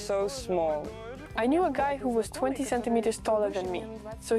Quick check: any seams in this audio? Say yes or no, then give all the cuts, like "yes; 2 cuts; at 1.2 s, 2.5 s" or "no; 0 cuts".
yes; 1 cut; at 1.0 s